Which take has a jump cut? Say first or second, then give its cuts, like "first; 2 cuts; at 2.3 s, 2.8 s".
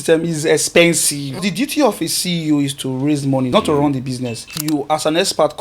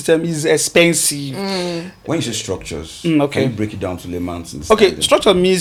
first; 3 cuts; at 1.4 s, 3.5 s, 4.5 s